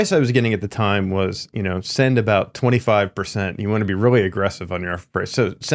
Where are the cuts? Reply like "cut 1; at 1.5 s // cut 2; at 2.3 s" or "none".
none